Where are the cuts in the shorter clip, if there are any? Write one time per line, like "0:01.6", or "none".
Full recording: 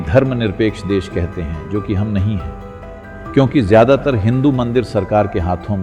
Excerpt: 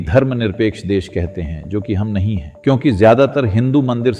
0:02.5